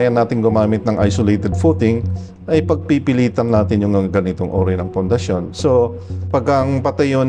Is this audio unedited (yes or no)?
yes